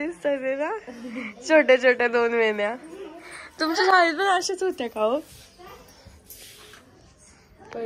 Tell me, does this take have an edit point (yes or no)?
no